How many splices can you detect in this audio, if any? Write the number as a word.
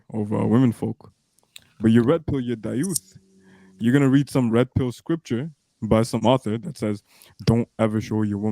one